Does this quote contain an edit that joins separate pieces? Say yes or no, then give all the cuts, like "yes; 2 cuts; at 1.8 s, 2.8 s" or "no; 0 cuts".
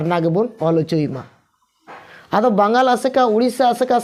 no; 0 cuts